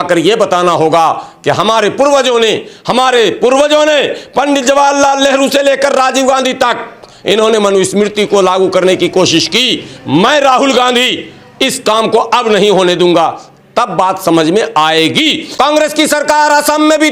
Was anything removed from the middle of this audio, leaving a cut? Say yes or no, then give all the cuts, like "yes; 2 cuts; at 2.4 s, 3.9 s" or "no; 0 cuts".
yes; 1 cut; at 15.4 s